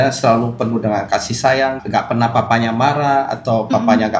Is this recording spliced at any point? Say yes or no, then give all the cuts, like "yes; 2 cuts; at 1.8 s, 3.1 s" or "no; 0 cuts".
yes; 1 cut; at 1.8 s